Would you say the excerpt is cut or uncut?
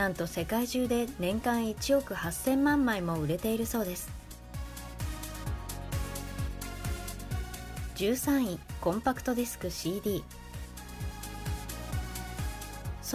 uncut